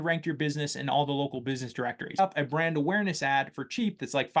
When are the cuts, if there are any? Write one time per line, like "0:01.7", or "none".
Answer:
0:02.2